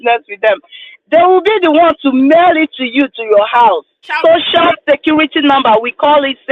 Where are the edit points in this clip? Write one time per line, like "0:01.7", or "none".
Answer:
0:04.1